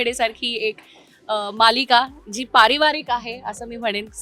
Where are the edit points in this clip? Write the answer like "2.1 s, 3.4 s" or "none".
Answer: none